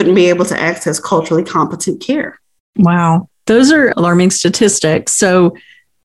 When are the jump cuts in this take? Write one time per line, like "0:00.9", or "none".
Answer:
0:03.3